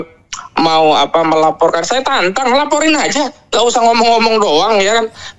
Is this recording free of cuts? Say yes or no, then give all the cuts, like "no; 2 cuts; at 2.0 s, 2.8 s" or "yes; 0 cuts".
yes; 0 cuts